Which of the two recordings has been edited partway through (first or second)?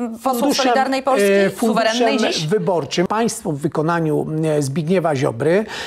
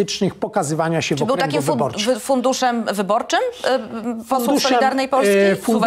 first